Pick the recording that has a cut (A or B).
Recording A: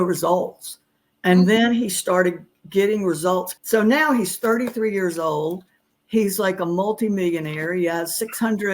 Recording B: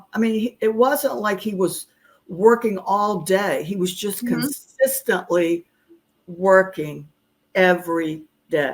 A